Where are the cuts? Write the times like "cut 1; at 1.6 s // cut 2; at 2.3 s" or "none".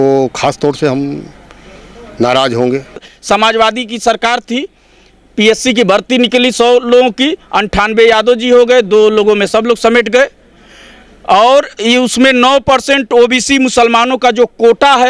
cut 1; at 3.1 s